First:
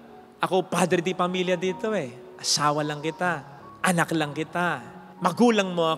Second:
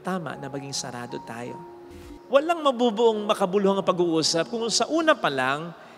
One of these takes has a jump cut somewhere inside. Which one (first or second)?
second